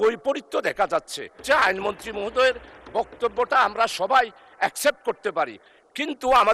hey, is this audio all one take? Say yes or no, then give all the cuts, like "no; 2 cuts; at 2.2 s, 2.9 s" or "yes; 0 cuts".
no; 1 cut; at 1.4 s